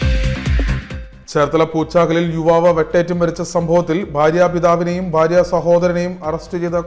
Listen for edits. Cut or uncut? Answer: cut